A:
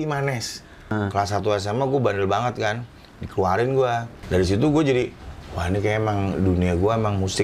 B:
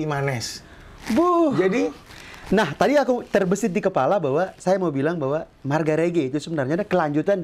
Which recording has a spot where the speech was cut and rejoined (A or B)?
A